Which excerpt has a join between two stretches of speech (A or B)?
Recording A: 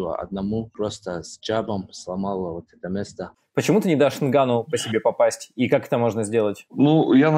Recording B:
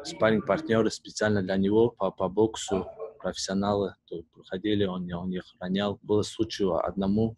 A